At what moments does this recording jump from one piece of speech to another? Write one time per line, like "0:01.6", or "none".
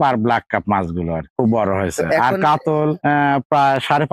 none